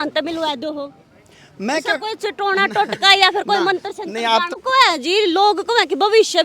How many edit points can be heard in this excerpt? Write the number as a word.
one